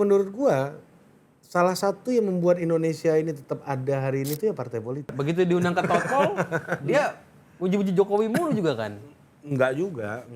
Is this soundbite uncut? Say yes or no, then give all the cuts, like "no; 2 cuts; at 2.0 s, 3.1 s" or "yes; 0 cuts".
no; 1 cut; at 5.1 s